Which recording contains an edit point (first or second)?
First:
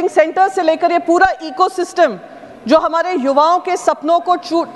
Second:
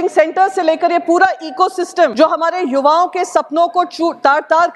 second